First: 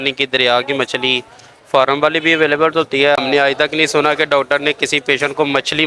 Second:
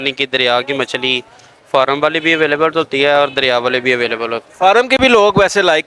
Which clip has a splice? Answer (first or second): first